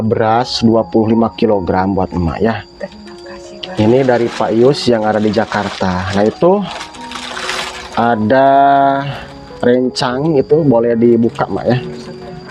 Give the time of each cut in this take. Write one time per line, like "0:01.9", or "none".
none